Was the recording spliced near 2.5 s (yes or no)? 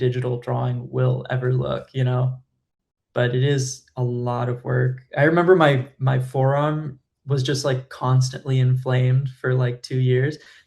yes